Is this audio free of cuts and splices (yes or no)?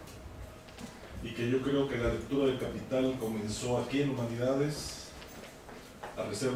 yes